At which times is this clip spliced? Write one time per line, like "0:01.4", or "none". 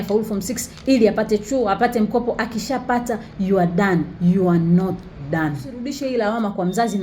0:05.9